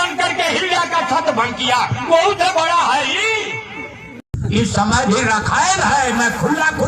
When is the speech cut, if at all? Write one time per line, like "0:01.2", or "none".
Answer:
0:04.1